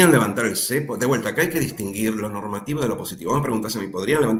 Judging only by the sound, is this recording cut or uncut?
uncut